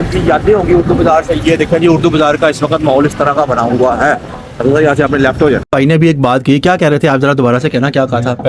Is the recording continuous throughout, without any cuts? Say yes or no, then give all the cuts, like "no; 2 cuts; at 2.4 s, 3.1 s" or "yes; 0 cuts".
no; 1 cut; at 5.7 s